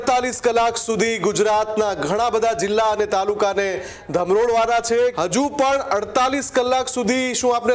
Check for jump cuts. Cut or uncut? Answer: cut